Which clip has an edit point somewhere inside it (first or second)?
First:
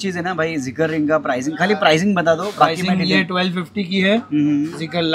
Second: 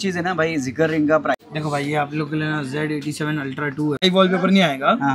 second